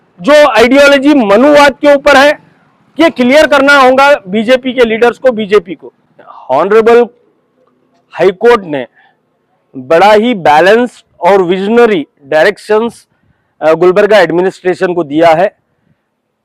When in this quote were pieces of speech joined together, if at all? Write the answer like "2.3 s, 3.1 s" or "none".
none